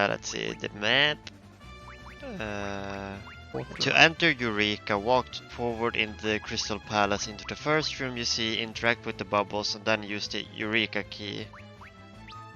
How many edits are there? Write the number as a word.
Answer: one